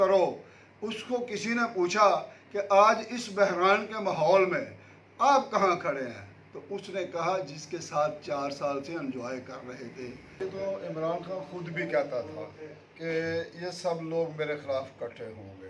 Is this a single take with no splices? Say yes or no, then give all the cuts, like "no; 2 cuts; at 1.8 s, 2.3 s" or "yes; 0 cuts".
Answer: no; 1 cut; at 10.4 s